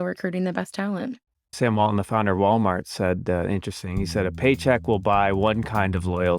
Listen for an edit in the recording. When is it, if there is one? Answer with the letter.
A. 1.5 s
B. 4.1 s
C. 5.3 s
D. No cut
A